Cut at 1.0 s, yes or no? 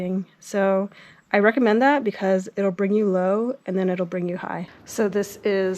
no